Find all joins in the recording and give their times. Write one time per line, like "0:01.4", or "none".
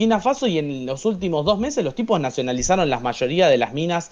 none

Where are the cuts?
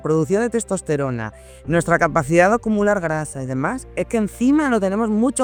none

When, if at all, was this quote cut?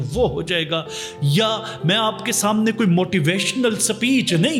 none

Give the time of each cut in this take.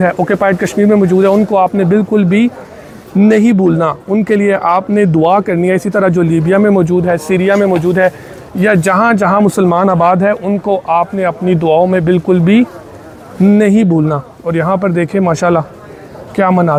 none

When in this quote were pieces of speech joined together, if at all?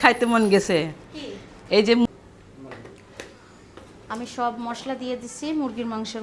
0:02.1

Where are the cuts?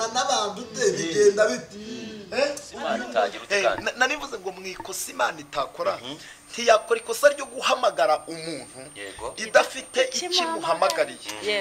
0:02.7

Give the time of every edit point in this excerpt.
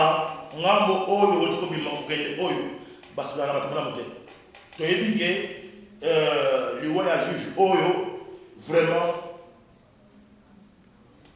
0:04.6

